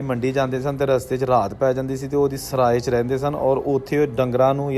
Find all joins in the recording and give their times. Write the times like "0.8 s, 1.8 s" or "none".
none